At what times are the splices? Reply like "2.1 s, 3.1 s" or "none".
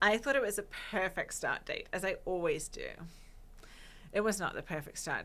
none